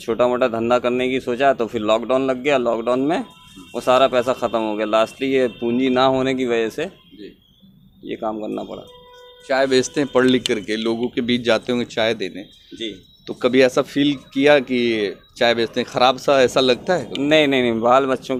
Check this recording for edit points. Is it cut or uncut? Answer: uncut